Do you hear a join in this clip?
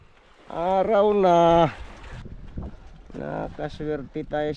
yes; 1 cut; at 2.2 s

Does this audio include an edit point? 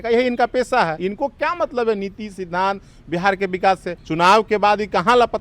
yes; 2 cuts; at 1.0 s, 4.0 s

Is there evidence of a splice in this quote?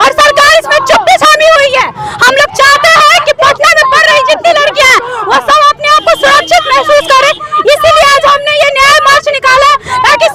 no; 0 cuts

